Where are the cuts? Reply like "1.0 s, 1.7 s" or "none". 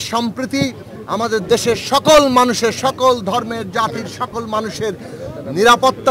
none